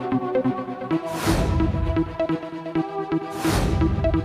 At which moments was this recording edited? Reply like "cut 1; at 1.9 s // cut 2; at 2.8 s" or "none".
none